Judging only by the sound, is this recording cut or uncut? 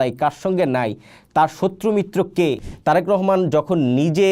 cut